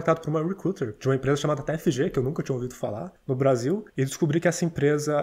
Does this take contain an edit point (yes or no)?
yes